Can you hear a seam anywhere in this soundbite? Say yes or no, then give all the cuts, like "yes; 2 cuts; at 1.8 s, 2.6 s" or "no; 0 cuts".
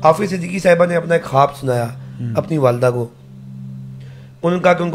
no; 0 cuts